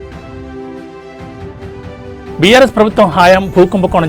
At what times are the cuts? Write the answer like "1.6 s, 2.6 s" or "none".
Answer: 2.3 s